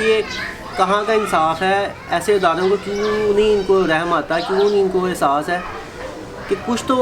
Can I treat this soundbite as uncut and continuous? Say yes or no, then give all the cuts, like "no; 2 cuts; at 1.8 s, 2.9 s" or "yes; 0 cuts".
yes; 0 cuts